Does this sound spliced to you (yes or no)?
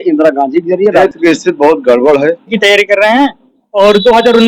yes